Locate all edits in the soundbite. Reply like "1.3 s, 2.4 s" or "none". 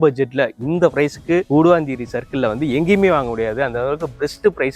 none